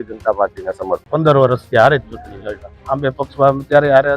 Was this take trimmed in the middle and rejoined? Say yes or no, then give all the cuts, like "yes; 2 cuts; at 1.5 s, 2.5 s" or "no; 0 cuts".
yes; 1 cut; at 1.0 s